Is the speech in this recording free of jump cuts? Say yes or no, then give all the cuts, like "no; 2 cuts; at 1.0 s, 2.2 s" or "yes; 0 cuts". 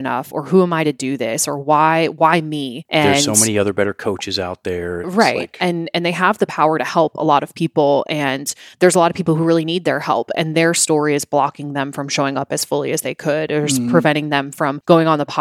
yes; 0 cuts